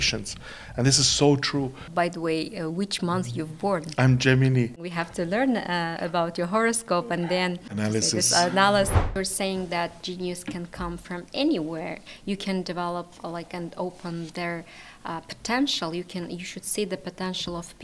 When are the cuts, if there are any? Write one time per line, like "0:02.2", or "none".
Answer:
0:01.8
0:04.8
0:07.7
0:09.2